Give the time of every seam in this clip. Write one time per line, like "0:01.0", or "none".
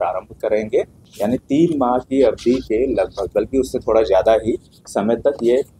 0:01.0